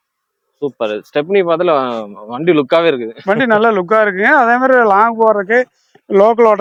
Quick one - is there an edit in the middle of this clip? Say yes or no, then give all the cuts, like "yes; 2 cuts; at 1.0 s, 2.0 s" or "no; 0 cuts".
no; 0 cuts